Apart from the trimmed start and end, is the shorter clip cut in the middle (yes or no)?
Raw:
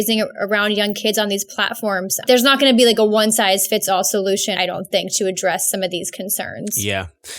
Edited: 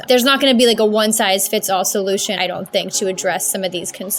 no